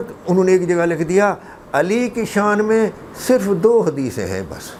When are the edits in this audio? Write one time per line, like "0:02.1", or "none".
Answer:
none